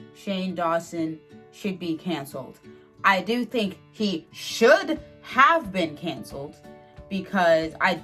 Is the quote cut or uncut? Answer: uncut